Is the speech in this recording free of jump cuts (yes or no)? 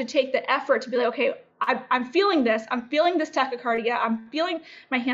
yes